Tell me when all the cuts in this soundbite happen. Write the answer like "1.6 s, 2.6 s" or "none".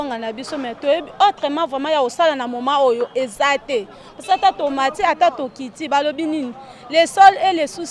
none